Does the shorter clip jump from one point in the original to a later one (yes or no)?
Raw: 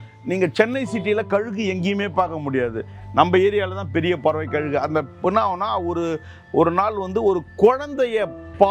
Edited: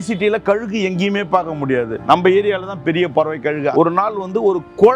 yes